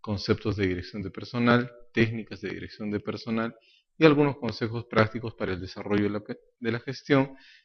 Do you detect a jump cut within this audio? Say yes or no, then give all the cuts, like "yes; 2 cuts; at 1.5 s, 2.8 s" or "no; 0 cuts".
yes; 1 cut; at 5.0 s